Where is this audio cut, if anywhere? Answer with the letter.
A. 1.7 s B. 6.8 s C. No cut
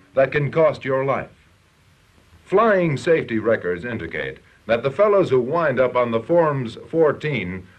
A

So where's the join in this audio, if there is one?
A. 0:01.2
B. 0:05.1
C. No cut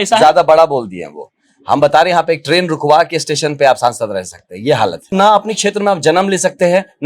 B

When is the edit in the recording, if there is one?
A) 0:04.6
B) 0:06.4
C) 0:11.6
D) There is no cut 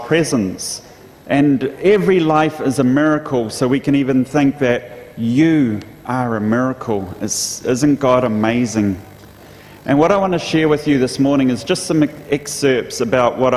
C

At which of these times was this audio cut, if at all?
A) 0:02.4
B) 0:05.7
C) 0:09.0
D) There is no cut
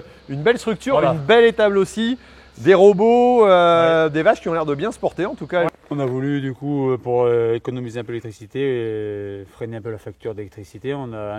B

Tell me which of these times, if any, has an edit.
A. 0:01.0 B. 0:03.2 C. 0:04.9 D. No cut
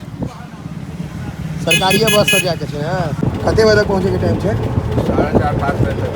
B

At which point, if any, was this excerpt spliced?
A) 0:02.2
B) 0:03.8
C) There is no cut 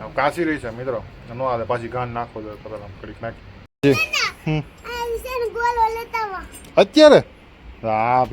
B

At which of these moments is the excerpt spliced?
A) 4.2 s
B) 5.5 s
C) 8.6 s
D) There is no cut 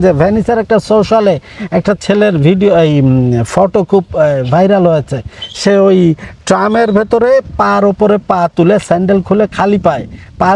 D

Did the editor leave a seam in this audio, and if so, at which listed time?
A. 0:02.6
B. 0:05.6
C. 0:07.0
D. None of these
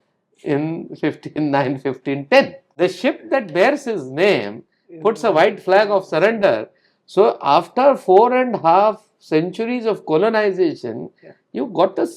A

